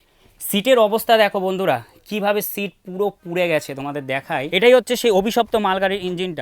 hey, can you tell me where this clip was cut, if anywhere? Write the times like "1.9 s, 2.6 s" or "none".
4.5 s